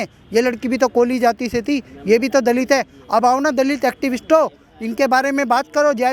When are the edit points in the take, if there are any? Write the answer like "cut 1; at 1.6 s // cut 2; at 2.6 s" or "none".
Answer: none